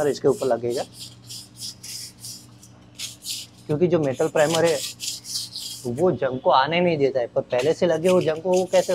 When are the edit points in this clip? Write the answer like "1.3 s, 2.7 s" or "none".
none